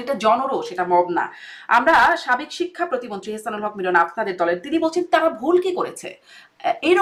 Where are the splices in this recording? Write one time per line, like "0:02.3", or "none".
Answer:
none

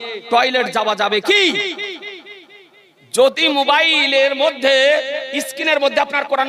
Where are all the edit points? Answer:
none

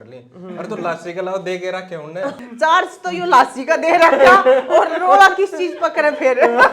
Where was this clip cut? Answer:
0:02.3

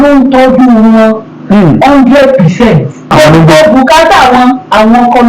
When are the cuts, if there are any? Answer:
0:03.1

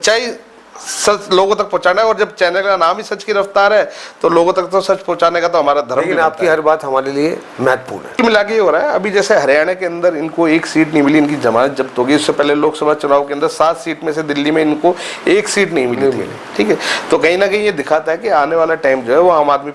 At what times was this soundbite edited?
0:08.2

